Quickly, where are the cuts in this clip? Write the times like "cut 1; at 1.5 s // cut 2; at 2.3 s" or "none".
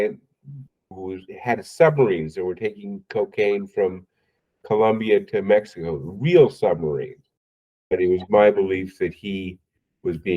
cut 1; at 0.9 s // cut 2; at 7.7 s